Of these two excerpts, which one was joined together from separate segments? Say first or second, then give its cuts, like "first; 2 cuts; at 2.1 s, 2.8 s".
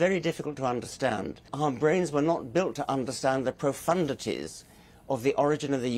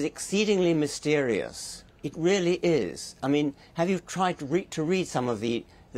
first; 1 cut; at 1.5 s